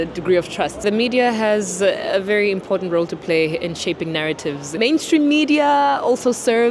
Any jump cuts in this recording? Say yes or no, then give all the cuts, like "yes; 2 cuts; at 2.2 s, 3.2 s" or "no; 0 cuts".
yes; 2 cuts; at 0.8 s, 4.7 s